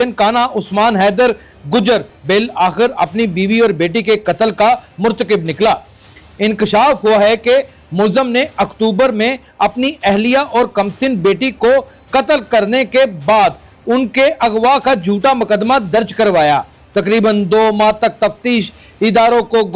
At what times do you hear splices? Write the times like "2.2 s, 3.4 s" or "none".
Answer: none